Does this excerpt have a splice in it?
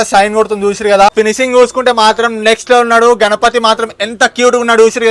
yes; 1 cut; at 1.1 s

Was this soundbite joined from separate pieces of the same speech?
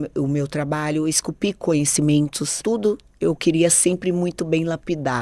yes; 1 cut; at 2.6 s

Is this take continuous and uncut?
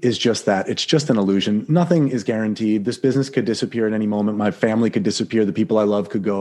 yes; 0 cuts

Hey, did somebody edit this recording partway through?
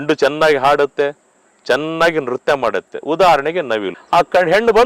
yes; 1 cut; at 3.9 s

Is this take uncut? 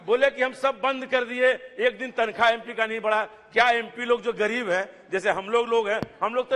yes; 0 cuts

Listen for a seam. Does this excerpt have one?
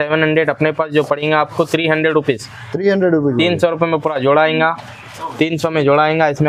no; 0 cuts

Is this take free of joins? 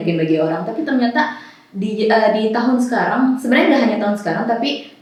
yes; 0 cuts

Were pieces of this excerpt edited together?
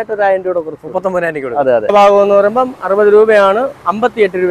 yes; 1 cut; at 1.9 s

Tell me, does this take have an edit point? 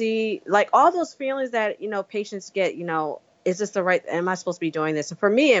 yes; 1 cut; at 3.3 s

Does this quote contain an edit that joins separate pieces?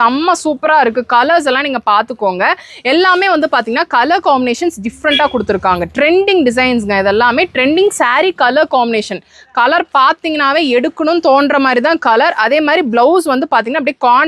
no; 0 cuts

